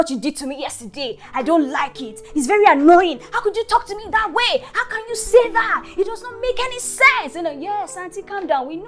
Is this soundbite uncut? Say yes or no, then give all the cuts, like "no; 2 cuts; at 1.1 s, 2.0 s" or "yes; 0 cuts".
yes; 0 cuts